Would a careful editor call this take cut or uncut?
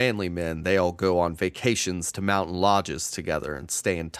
uncut